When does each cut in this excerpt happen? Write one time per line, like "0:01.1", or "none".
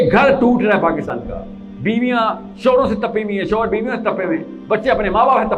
0:01.1